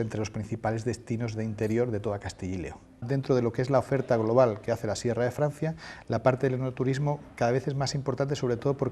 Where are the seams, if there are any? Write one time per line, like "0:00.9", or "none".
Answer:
0:03.0